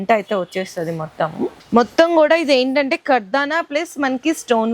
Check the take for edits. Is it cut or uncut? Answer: cut